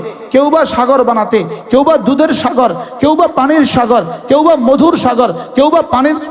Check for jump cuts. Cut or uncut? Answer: uncut